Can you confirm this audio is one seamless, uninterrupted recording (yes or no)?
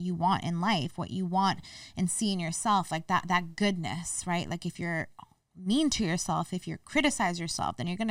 yes